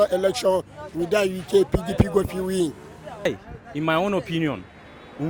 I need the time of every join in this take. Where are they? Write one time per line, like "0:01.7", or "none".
0:03.2